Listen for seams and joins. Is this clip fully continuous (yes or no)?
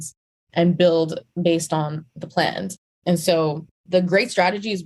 no